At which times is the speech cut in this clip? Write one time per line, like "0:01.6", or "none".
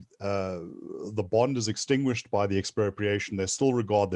none